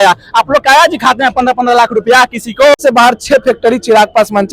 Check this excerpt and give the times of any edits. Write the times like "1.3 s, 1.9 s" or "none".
2.8 s